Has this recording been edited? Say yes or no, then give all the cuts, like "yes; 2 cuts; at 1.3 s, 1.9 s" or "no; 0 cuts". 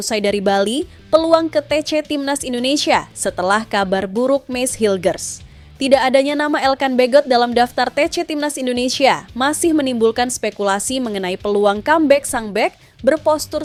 no; 0 cuts